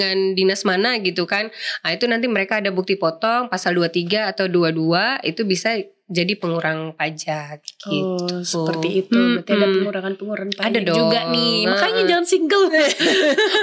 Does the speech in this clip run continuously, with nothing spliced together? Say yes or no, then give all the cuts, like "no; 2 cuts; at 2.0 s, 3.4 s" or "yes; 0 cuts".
yes; 0 cuts